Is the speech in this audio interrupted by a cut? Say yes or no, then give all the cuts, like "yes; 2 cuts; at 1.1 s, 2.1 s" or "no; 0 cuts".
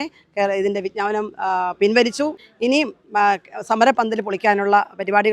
yes; 1 cut; at 2.4 s